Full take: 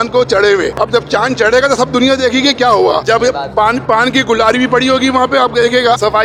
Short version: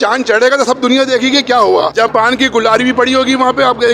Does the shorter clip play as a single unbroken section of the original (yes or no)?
no